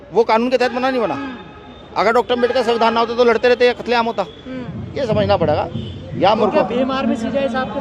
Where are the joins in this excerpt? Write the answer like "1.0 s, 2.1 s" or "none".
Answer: none